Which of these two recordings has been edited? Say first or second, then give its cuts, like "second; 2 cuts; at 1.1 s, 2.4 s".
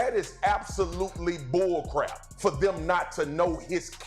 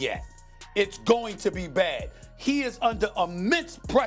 first; 1 cut; at 2.2 s